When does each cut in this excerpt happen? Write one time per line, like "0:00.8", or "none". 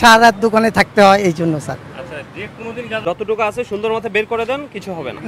0:03.0